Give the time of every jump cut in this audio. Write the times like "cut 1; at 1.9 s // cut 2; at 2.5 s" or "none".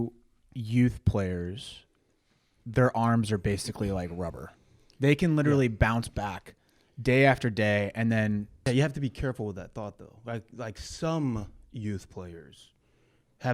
cut 1; at 8.7 s